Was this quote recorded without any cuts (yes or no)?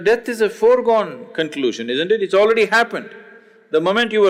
yes